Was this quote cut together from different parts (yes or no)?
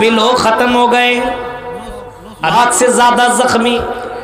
yes